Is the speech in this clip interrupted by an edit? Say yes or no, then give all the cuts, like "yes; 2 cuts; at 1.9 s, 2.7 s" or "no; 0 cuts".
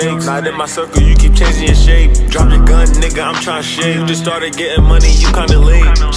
no; 0 cuts